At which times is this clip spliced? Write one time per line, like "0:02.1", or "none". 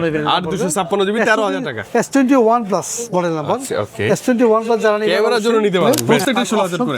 0:06.0